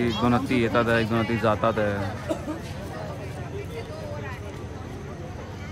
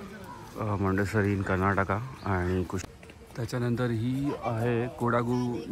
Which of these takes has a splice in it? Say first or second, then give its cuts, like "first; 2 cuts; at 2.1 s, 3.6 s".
second; 1 cut; at 2.8 s